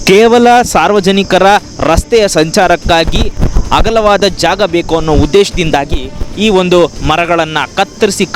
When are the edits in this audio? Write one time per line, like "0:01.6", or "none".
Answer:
none